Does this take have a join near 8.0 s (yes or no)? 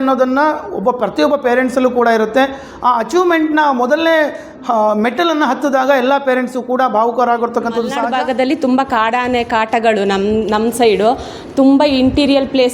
yes